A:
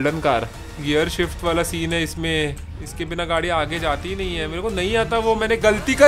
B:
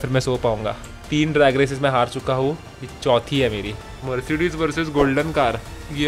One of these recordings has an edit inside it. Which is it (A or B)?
B